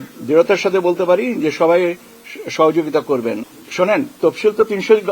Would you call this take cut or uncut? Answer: cut